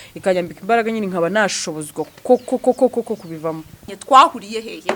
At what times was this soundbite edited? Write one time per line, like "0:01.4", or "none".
0:03.9